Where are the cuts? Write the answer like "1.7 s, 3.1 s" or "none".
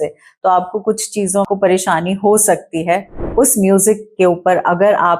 1.5 s, 3.1 s